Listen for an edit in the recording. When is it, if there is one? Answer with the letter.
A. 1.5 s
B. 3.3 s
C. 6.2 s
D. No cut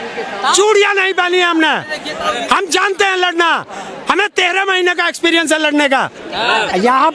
C